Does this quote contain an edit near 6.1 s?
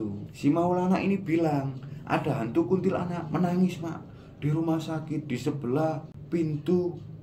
yes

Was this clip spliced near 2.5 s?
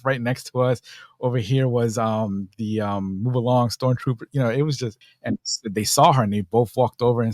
no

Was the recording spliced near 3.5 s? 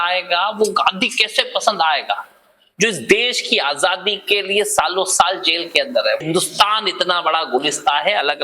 no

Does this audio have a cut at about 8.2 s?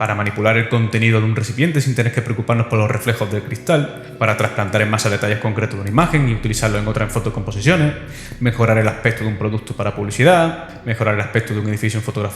no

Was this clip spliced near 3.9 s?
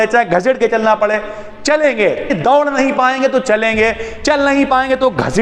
no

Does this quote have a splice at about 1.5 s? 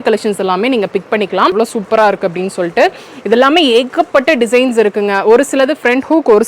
yes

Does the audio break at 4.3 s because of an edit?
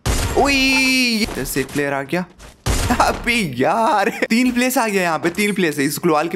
yes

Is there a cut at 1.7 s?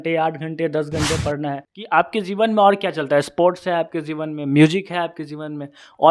yes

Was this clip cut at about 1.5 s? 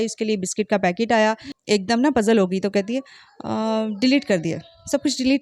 yes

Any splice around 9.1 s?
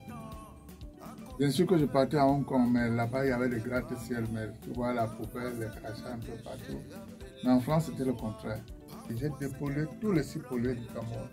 yes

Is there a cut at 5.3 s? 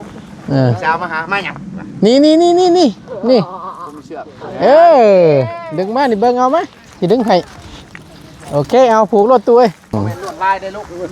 no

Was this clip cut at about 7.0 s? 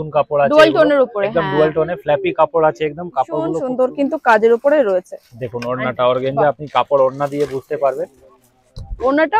no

